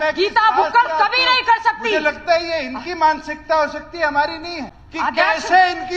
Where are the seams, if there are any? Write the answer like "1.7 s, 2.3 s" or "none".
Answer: 4.6 s